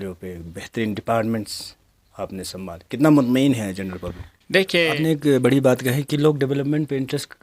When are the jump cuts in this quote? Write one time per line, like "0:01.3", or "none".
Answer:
0:04.8